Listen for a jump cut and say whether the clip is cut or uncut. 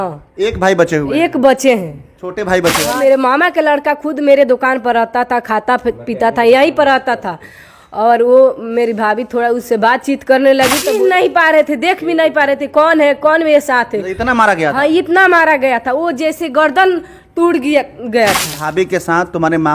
cut